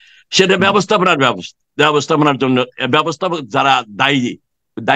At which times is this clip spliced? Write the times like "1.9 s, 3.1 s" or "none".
none